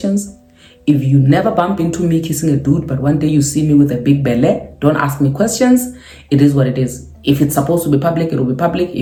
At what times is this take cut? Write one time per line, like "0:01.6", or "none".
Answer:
none